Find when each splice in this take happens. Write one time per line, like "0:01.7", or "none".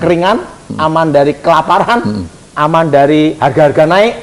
none

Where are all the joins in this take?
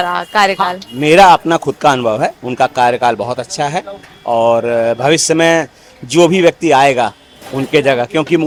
none

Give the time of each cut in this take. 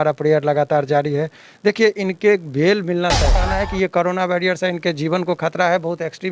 0:03.4

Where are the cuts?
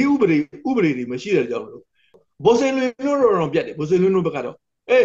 0:02.1

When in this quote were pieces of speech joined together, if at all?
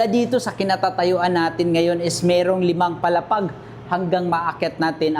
none

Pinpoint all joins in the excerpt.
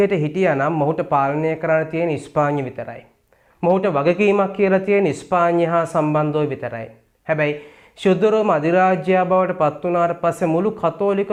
none

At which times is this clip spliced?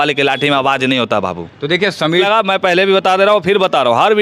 0:02.2

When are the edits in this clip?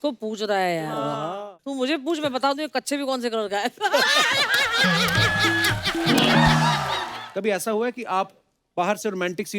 0:01.4
0:07.0

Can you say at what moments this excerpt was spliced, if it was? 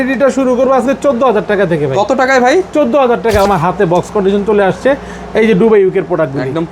0:03.5

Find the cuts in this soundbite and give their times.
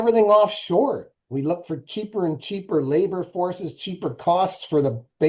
none

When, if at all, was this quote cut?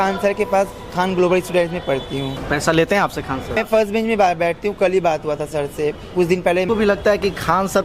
0:02.4
0:03.6
0:06.7

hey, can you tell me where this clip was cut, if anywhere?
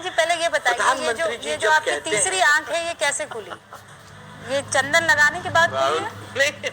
0:05.7

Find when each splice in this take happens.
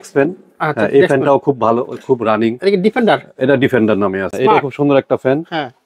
0:04.3

